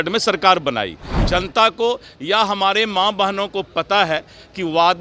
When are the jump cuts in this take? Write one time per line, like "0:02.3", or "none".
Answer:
0:01.2